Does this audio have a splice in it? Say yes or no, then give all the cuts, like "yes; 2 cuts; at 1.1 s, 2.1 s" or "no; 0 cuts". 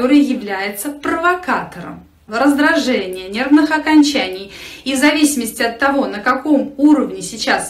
yes; 1 cut; at 2.1 s